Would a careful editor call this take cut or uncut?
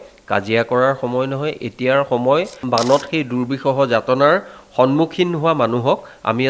cut